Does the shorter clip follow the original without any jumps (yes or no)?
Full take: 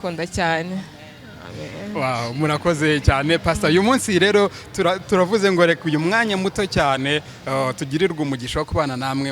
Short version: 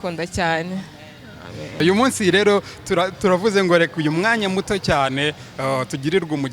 no